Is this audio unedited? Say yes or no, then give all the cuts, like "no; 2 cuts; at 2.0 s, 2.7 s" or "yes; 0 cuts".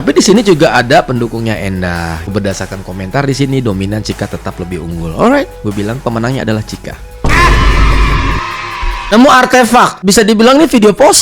no; 3 cuts; at 2.3 s, 9.1 s, 10.0 s